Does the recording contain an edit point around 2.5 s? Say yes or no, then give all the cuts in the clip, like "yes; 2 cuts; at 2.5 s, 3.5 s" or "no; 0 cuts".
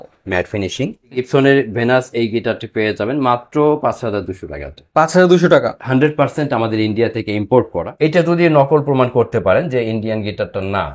no; 3 cuts; at 1.2 s, 5.8 s, 7.8 s